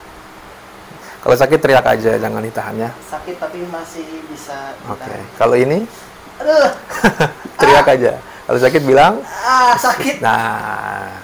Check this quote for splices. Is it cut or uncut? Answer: uncut